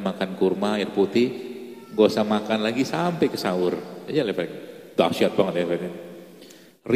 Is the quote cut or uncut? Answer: uncut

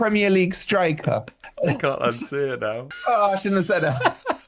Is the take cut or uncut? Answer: cut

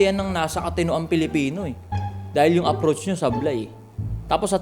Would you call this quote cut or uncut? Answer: uncut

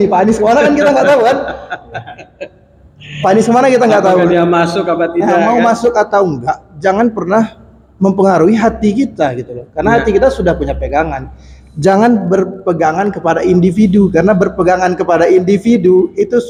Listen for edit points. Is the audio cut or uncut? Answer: uncut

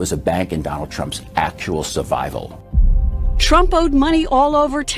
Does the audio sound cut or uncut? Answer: cut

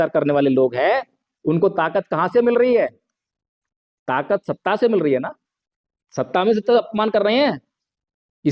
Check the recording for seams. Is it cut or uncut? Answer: cut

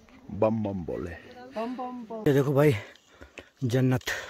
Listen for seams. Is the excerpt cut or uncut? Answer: cut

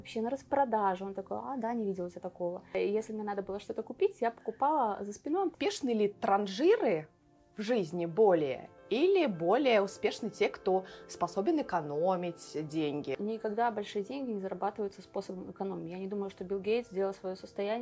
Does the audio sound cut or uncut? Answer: cut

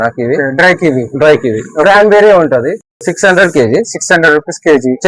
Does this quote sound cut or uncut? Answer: uncut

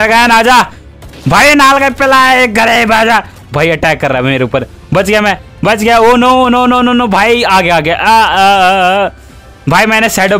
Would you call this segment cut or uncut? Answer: uncut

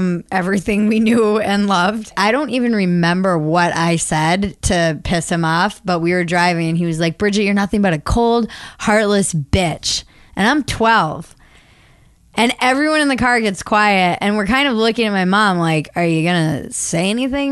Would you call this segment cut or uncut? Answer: cut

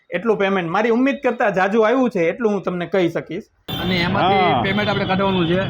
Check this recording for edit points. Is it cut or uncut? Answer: cut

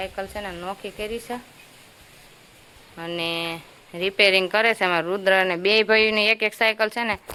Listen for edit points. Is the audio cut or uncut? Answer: uncut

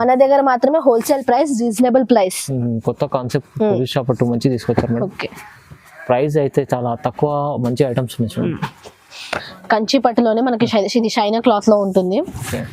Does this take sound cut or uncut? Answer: cut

